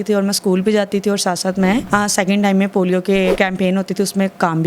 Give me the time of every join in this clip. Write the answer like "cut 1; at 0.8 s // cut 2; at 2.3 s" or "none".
cut 1; at 1.8 s // cut 2; at 3.3 s